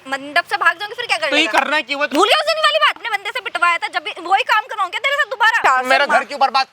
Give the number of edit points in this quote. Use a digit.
3